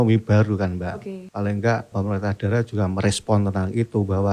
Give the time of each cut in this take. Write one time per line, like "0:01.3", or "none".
0:01.2
0:01.9